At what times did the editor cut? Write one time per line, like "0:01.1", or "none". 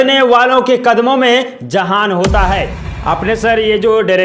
0:02.7